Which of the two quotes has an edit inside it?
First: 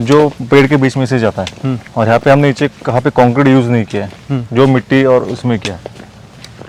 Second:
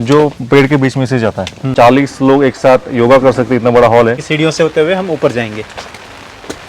second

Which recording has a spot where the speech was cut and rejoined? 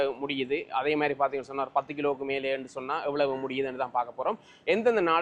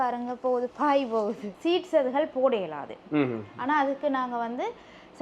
second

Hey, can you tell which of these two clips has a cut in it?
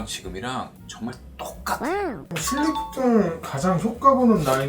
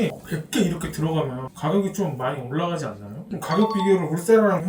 first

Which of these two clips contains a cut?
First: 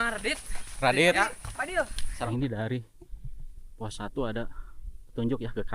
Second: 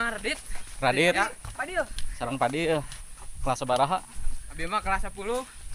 first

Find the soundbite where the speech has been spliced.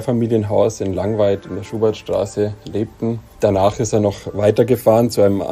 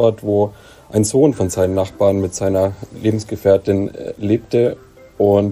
first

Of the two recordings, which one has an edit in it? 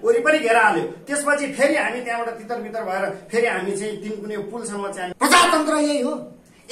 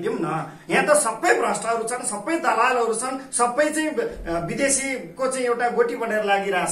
first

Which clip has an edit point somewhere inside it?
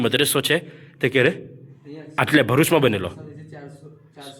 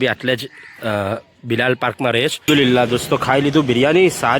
second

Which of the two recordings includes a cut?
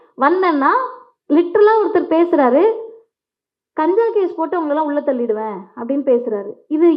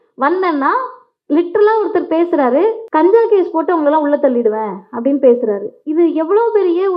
second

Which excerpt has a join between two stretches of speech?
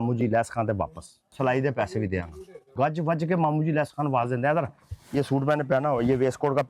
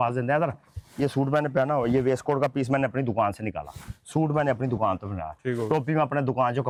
first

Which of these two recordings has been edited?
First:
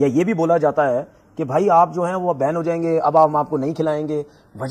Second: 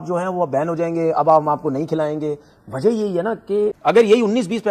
second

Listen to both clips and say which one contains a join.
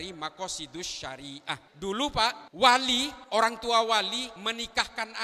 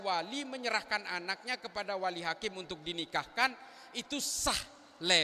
first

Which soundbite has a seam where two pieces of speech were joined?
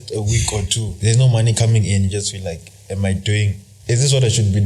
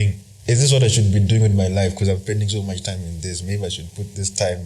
first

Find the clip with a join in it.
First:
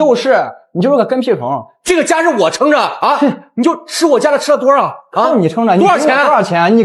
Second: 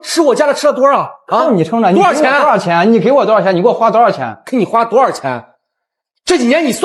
first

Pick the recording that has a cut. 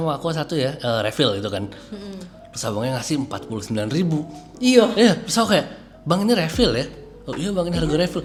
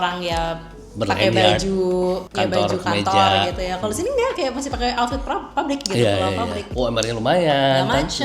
second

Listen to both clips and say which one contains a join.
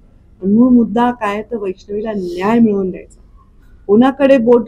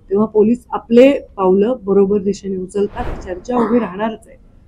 second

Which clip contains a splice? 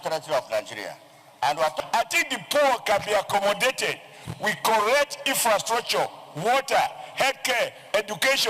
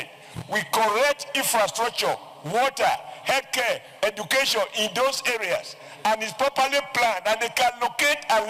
first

